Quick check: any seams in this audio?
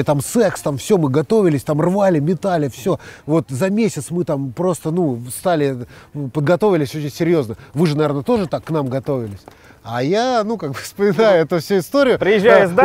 no; 0 cuts

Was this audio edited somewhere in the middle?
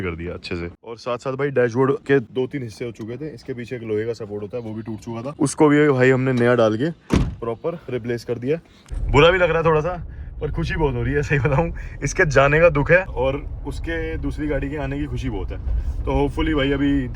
yes; 5 cuts; at 1.0 s, 2.1 s, 5.3 s, 8.3 s, 13.1 s

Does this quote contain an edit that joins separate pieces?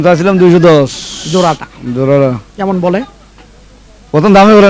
no; 0 cuts

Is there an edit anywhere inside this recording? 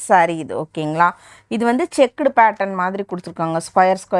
no; 0 cuts

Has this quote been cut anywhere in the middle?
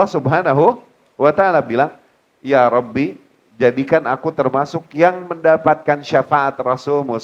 no; 0 cuts

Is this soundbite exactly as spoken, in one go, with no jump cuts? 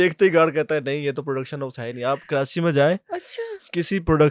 yes; 0 cuts

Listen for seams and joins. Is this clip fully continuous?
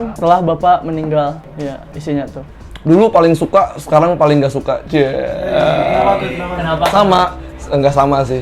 yes; 0 cuts

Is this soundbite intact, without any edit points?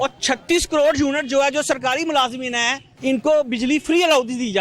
no; 1 cut; at 2.8 s

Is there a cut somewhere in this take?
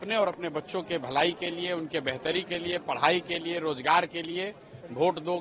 no; 0 cuts

